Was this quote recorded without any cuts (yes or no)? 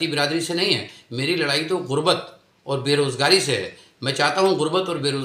yes